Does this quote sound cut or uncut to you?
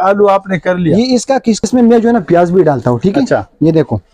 cut